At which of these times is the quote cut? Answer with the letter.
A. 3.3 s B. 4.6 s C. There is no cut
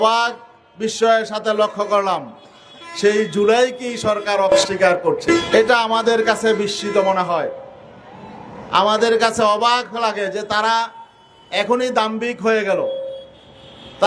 B